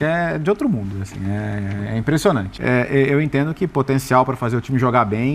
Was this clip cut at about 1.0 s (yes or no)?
no